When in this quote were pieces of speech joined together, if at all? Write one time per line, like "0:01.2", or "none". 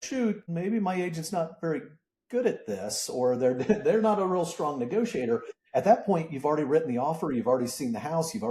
none